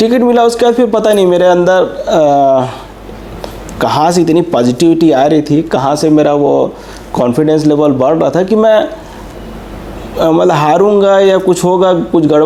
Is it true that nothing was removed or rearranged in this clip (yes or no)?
yes